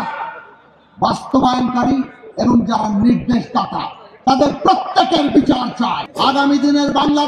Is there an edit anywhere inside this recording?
yes; 1 cut; at 6.1 s

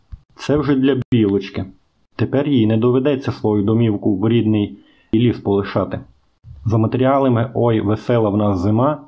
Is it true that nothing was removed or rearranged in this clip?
yes; 0 cuts

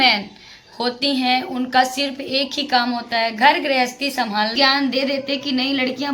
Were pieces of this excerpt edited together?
yes; 1 cut; at 4.5 s

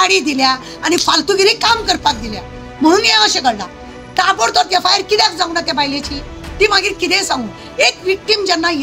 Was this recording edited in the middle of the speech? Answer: no; 0 cuts

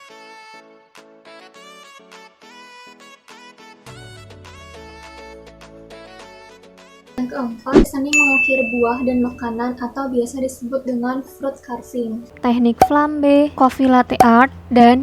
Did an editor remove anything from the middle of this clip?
yes; 2 cuts; at 7.9 s, 12.2 s

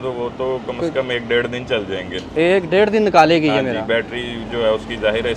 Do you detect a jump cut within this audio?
no; 0 cuts

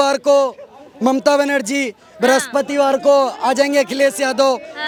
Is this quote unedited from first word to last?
yes; 0 cuts

